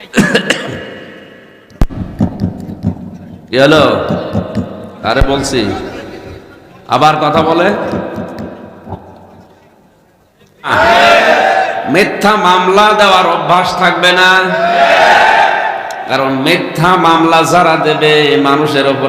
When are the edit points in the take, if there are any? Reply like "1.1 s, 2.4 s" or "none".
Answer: 10.7 s